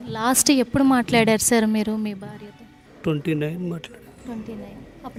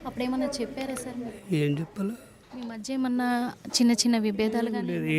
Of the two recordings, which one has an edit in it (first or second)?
second